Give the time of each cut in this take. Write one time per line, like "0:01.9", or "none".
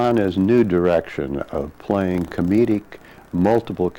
none